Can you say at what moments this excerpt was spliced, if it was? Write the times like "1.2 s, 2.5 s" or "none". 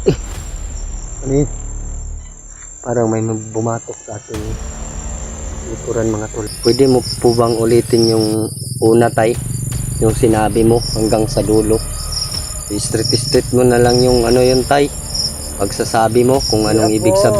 6.5 s